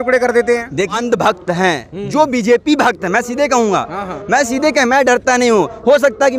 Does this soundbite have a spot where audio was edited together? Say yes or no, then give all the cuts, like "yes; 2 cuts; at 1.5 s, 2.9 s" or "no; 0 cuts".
yes; 1 cut; at 0.9 s